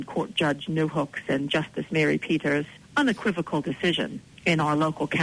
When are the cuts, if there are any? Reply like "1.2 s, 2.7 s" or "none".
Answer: 2.8 s, 4.2 s